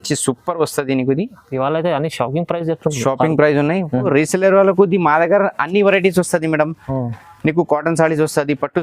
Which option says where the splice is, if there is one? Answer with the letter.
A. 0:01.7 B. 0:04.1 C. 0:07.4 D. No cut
B